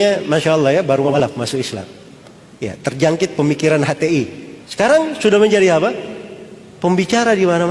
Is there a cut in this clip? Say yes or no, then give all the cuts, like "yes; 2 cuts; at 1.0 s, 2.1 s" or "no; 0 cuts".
yes; 1 cut; at 1.2 s